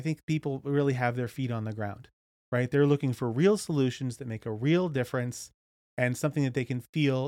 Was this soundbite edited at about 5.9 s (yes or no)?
no